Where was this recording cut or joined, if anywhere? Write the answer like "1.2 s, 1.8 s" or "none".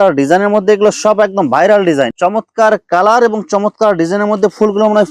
2.1 s